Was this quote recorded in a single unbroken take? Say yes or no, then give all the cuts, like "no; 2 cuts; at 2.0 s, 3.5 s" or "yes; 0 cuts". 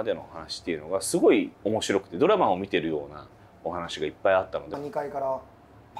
no; 2 cuts; at 1.6 s, 4.8 s